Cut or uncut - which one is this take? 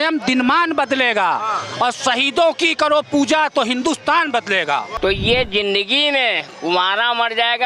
cut